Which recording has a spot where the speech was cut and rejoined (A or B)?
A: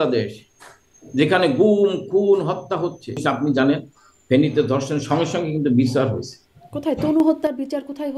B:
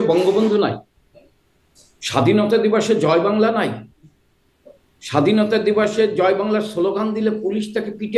A